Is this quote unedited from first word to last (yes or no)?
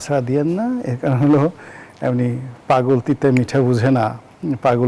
yes